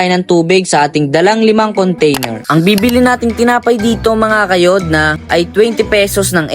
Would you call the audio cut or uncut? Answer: cut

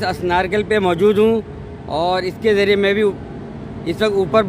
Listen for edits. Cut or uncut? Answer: uncut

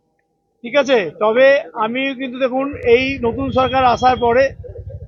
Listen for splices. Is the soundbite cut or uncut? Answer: uncut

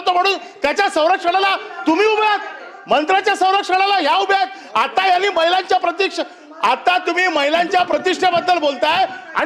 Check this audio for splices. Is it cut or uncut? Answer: uncut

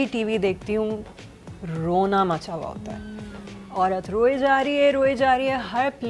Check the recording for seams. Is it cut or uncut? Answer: uncut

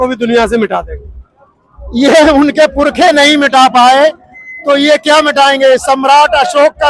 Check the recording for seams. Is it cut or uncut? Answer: uncut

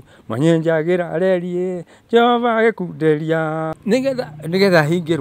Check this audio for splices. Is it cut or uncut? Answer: cut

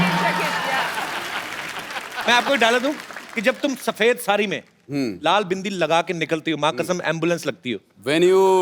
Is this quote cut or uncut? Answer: cut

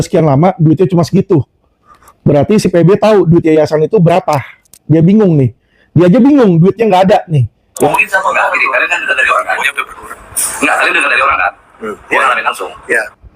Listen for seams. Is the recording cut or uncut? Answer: cut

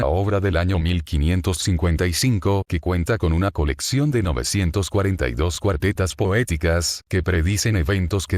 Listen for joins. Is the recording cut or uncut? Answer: cut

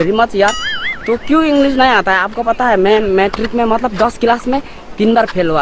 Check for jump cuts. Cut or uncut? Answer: uncut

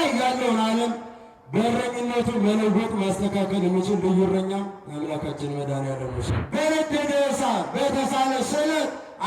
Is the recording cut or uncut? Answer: cut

